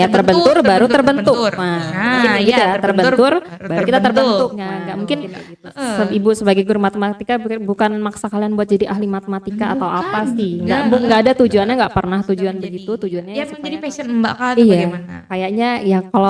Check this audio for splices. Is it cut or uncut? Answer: cut